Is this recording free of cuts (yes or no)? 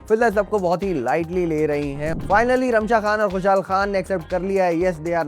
no